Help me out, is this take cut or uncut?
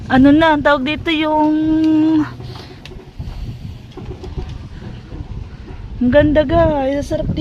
uncut